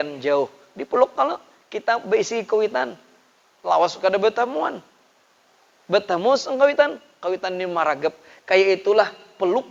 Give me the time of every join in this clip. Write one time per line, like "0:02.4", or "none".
none